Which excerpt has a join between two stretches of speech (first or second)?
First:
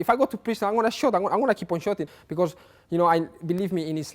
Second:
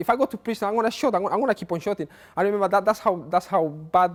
first